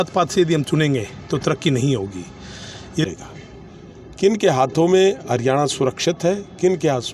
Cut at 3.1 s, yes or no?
yes